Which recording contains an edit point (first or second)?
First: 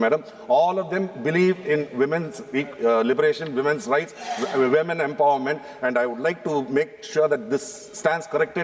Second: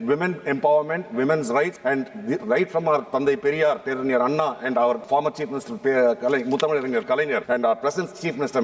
second